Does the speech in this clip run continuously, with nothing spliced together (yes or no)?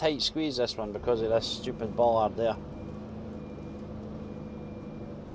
yes